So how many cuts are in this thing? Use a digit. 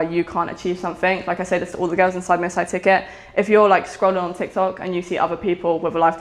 0